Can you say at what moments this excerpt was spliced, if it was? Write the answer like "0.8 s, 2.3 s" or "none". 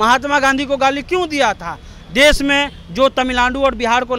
none